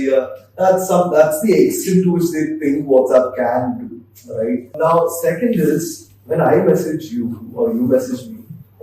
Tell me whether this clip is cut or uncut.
cut